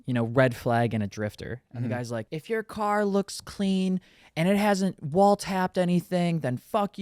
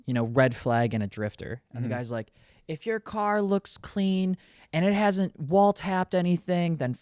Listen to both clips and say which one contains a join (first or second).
first